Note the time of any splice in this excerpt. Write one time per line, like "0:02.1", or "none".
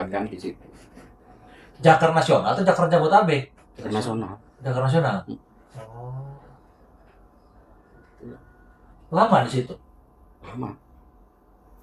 none